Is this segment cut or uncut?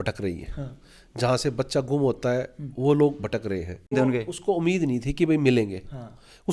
cut